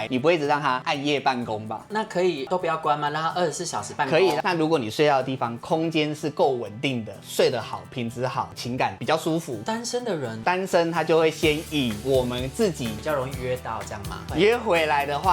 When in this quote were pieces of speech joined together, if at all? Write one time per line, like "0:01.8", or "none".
0:04.4
0:09.0
0:12.9